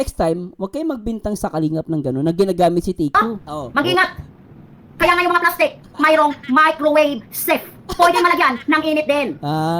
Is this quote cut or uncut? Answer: cut